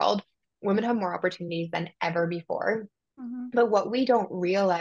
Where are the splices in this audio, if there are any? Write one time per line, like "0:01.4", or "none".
none